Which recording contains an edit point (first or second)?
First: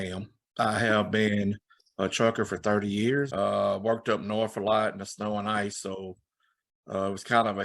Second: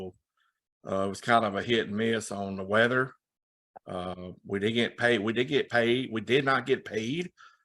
first